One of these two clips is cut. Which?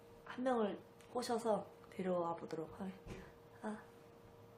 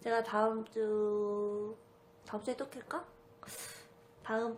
first; 1 cut; at 3.5 s

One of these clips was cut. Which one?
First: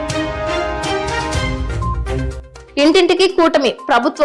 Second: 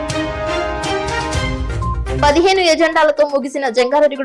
second; 1 cut; at 2.2 s

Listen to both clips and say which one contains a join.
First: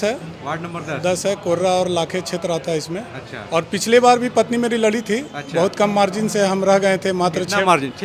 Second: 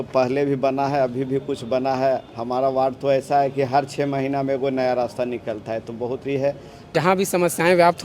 second; 1 cut; at 6.9 s

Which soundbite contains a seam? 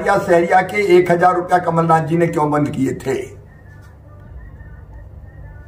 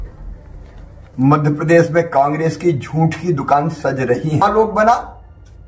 second; 1 cut; at 4.4 s

